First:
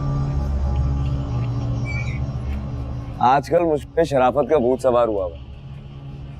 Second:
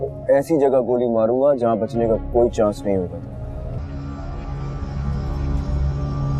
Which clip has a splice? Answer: second; 1 cut; at 3.8 s

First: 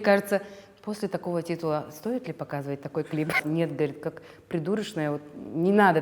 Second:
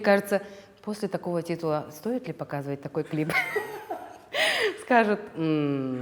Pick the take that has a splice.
first; 1 cut; at 3.4 s

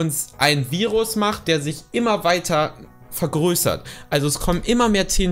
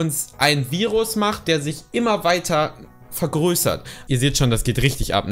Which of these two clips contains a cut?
second; 1 cut; at 4.0 s

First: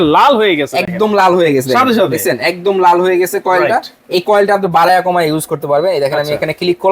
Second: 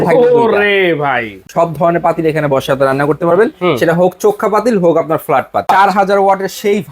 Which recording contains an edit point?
second; 2 cuts; at 1.4 s, 5.7 s

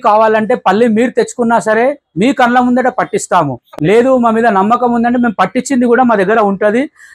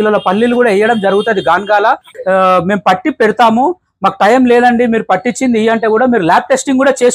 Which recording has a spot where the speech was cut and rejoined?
second; 1 cut; at 2.1 s

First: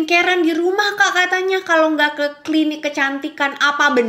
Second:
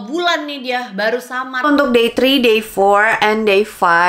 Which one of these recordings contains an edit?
second; 1 cut; at 1.6 s

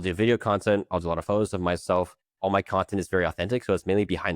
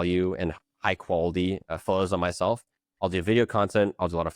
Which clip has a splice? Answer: first; 1 cut; at 2.2 s

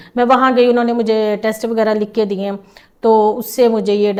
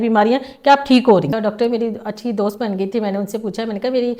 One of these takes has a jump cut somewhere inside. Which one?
second; 1 cut; at 1.3 s

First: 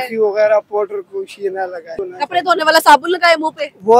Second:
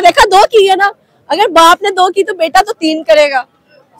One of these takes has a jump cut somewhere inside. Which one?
first; 1 cut; at 2.0 s

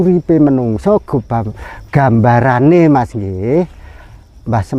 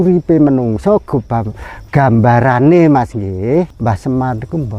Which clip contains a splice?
second; 1 cut; at 3.7 s

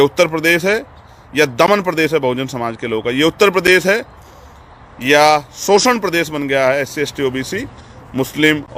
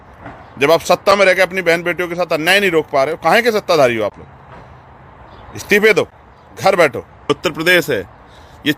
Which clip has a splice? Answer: second; 1 cut; at 7.3 s

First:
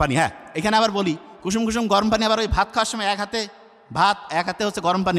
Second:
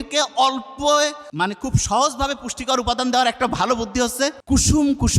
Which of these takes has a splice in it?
second; 2 cuts; at 1.2 s, 4.4 s

